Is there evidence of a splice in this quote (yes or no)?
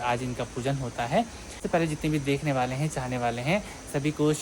no